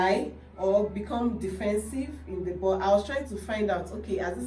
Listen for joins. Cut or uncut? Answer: uncut